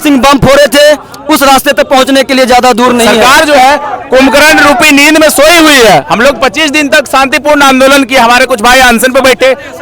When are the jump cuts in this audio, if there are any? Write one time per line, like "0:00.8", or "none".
0:03.1